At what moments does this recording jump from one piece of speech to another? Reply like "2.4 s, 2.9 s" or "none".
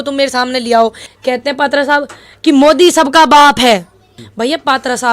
1.1 s, 4.2 s